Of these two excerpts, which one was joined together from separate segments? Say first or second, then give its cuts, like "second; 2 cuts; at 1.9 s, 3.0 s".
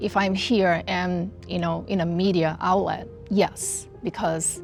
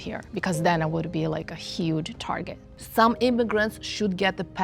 second; 1 cut; at 2.8 s